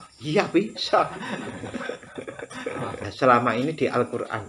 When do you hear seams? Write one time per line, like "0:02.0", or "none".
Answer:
0:03.0